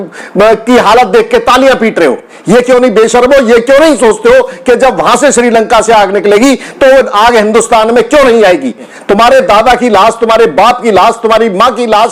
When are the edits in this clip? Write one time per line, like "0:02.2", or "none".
0:02.3
0:08.9